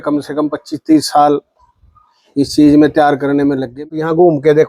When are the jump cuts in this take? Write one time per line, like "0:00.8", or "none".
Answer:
0:03.7